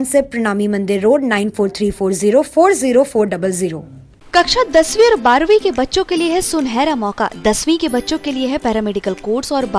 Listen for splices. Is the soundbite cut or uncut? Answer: uncut